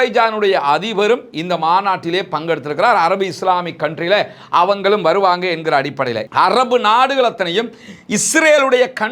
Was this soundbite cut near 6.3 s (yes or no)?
yes